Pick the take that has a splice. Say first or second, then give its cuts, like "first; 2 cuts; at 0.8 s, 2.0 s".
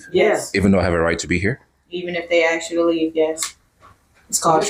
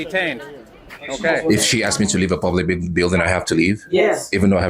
second; 1 cut; at 1.4 s